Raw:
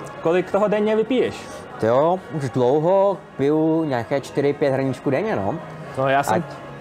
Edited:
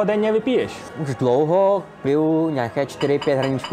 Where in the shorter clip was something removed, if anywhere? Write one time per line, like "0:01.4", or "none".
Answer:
0:01.0